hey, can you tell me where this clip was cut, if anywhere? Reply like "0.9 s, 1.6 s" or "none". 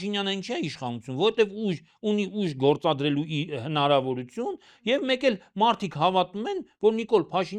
none